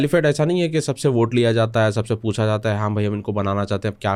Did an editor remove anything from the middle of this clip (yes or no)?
no